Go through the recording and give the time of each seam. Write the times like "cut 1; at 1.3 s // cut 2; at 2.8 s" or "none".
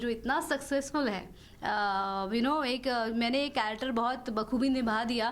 cut 1; at 1.4 s